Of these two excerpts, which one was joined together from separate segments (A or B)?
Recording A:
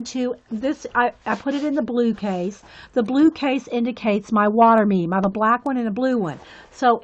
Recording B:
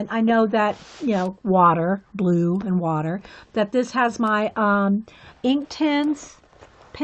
B